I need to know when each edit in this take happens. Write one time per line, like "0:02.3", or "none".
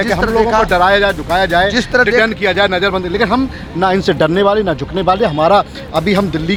none